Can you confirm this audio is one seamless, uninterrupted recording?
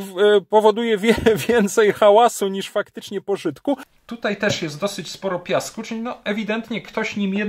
no; 1 cut; at 3.9 s

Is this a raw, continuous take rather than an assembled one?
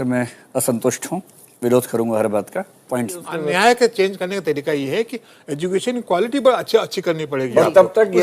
no; 1 cut; at 3.4 s

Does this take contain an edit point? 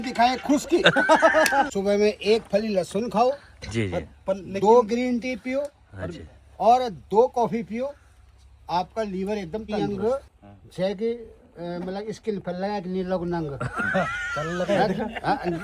yes; 2 cuts; at 1.7 s, 9.7 s

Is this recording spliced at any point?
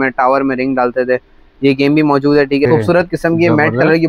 yes; 1 cut; at 2.7 s

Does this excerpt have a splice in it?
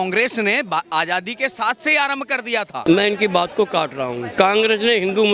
yes; 2 cuts; at 2.8 s, 4.3 s

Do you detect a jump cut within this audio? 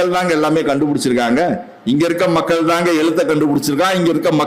no; 0 cuts

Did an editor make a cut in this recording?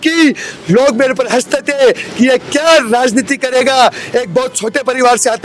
no; 0 cuts

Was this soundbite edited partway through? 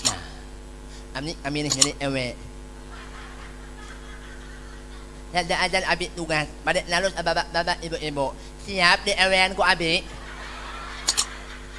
no; 0 cuts

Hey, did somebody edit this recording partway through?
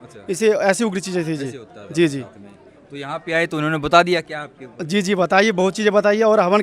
no; 0 cuts

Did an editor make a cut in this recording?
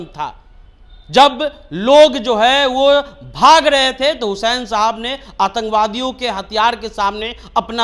no; 0 cuts

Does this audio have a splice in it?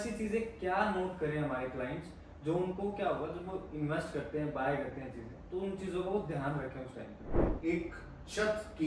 yes; 1 cut; at 7.4 s

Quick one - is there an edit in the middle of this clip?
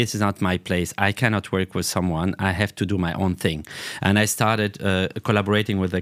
no; 0 cuts

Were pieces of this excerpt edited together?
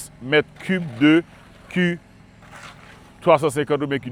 no; 0 cuts

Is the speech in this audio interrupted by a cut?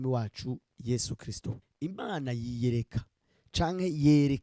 yes; 1 cut; at 1.6 s

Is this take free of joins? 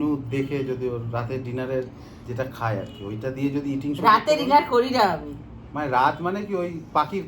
yes; 0 cuts

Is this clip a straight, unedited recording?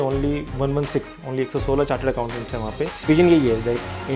no; 1 cut; at 3.1 s

